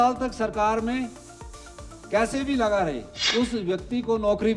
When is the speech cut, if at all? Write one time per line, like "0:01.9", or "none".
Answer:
0:03.1

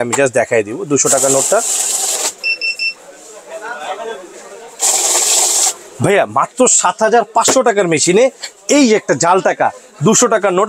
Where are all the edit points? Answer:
none

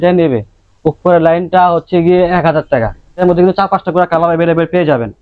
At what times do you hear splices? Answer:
0:03.2

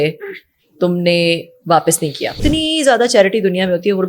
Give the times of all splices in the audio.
0:02.4

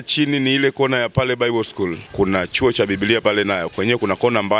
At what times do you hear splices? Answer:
0:02.0

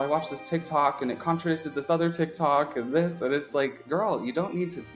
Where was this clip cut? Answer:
0:03.8

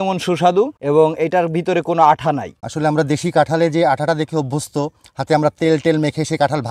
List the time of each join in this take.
none

